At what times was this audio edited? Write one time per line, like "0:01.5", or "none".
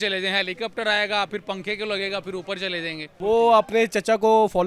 0:03.2